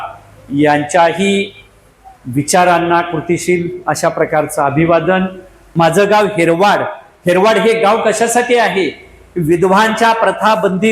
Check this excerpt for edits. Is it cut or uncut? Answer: cut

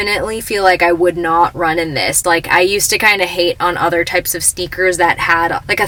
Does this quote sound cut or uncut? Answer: uncut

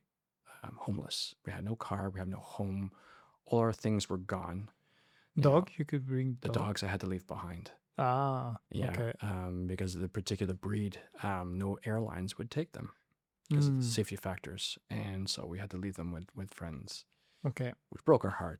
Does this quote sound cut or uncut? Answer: uncut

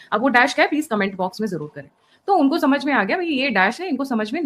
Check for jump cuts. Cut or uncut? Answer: uncut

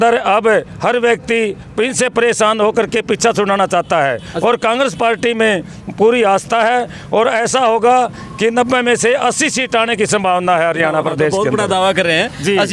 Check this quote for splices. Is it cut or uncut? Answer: uncut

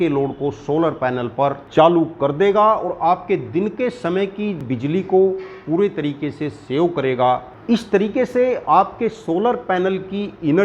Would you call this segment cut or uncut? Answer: cut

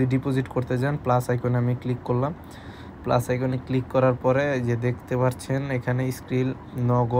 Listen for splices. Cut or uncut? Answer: uncut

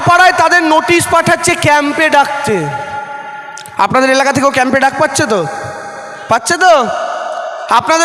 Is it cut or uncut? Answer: uncut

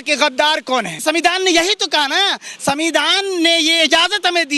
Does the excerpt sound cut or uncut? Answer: cut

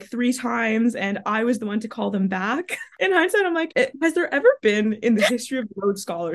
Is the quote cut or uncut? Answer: cut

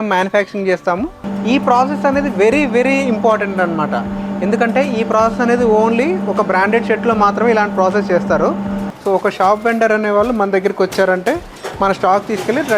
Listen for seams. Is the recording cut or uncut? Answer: cut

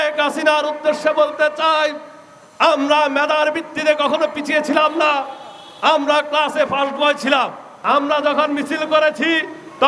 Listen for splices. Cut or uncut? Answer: cut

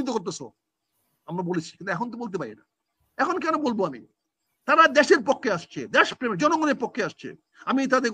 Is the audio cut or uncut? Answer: uncut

